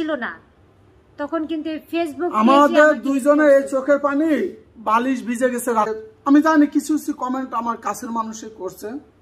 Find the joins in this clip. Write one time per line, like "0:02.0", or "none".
0:05.9